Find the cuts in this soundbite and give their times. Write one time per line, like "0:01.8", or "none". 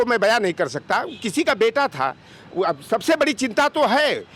none